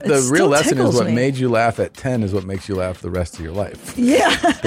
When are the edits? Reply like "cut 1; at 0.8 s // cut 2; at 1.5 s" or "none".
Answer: none